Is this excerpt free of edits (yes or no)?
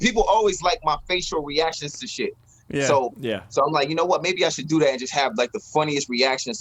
yes